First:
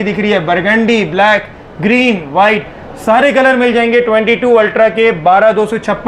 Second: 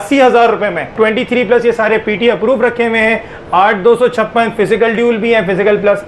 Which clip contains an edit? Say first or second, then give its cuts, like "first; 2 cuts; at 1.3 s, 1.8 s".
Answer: second; 1 cut; at 0.9 s